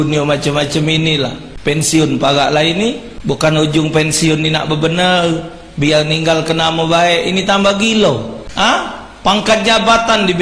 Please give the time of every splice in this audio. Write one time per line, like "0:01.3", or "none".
0:01.5
0:03.1
0:08.4